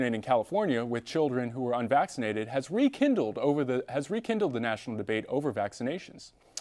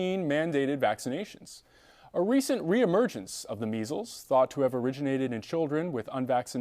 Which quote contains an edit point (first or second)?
second